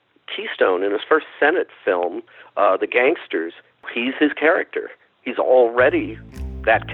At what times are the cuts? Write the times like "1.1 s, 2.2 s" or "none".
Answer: 3.9 s